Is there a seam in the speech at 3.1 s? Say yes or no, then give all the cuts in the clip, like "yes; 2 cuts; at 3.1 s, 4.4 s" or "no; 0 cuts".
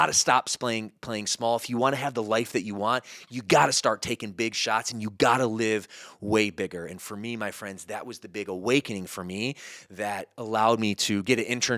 no; 0 cuts